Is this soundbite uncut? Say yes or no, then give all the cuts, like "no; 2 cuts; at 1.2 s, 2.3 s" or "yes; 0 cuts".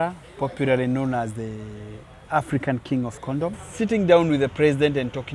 no; 1 cut; at 3.6 s